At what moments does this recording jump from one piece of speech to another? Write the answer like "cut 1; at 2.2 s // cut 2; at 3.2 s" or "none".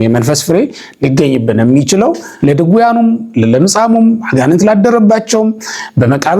cut 1; at 2.3 s